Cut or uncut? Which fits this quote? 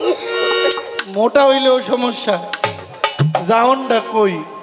uncut